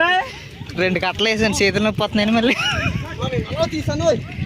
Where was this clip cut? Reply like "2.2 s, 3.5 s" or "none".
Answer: 3.2 s